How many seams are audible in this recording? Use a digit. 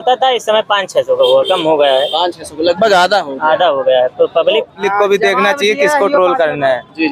1